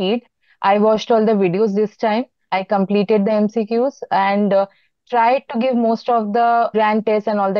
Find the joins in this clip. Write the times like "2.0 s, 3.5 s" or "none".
6.7 s